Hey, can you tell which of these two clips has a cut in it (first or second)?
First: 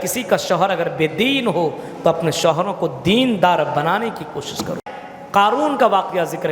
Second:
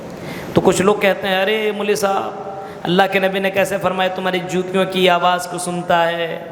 first